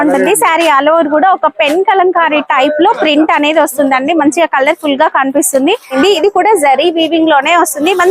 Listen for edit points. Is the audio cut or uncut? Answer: cut